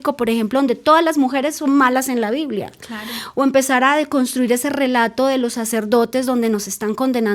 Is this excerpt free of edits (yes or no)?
yes